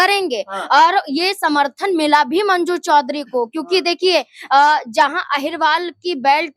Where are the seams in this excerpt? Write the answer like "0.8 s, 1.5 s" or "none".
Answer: none